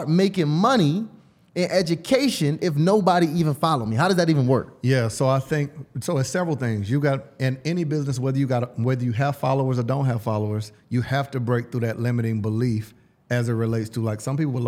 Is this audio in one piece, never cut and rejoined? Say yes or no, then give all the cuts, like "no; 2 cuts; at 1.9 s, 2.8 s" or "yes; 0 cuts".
yes; 0 cuts